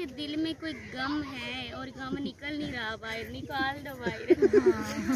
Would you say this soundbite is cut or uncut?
uncut